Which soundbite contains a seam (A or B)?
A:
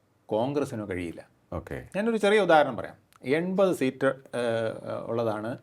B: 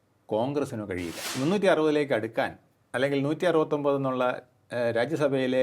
B